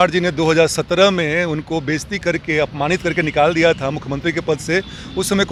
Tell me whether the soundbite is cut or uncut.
uncut